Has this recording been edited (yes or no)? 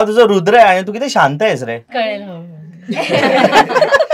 yes